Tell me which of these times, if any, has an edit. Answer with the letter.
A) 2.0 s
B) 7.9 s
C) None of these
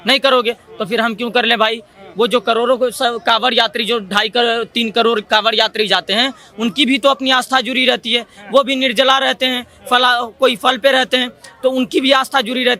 C